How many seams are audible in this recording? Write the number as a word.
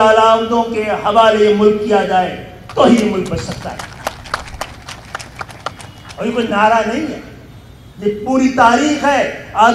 zero